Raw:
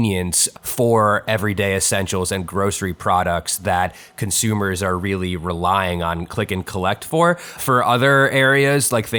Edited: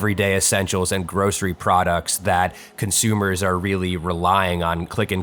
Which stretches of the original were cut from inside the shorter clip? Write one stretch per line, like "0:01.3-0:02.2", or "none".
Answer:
none